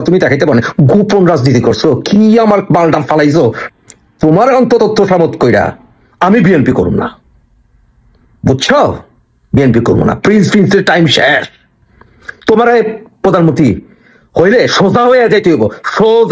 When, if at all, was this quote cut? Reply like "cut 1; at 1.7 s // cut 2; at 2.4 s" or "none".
cut 1; at 3.6 s